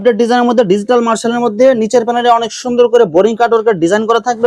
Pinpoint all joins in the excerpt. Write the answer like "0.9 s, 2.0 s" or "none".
none